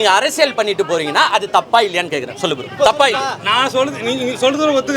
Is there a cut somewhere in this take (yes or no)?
no